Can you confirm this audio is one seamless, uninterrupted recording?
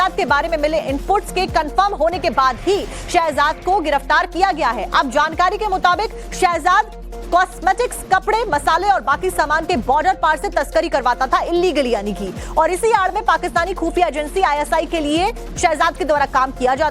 no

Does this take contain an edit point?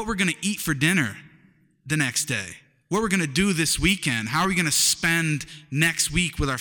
no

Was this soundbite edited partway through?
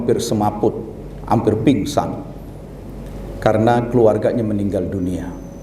no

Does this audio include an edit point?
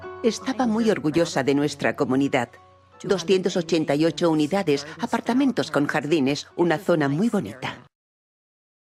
no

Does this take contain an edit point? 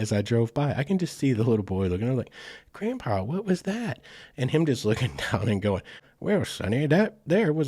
yes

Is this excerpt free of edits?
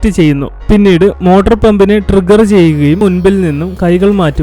no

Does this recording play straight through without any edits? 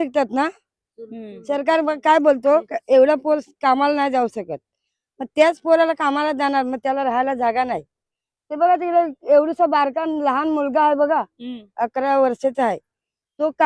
yes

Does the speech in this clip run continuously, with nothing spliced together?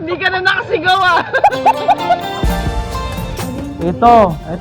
no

